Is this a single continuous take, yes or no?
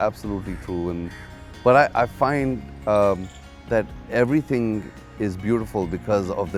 yes